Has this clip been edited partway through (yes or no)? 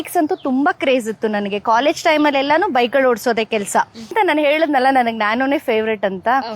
yes